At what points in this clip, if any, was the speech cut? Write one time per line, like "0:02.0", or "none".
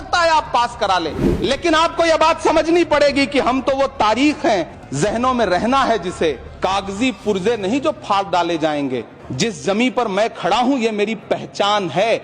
0:01.2
0:04.8
0:06.5
0:09.2